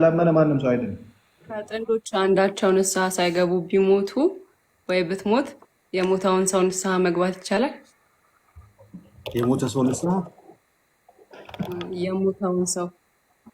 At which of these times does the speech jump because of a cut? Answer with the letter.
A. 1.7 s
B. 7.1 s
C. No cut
A